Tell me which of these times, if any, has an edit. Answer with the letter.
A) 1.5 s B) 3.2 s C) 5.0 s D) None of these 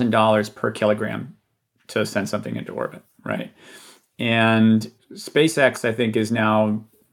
D